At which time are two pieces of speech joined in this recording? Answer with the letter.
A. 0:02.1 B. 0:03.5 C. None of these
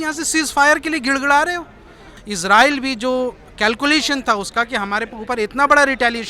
A